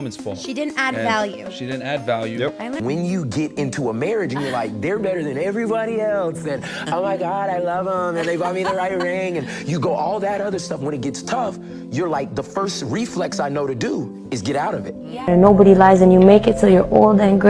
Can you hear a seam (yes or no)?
yes